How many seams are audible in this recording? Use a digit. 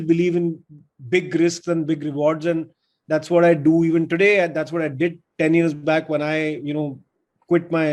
0